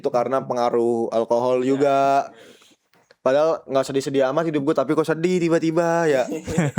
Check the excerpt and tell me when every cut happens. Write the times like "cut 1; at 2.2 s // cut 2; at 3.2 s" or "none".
none